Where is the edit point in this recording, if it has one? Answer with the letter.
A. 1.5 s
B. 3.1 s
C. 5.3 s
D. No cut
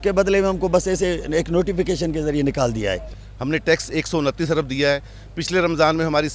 B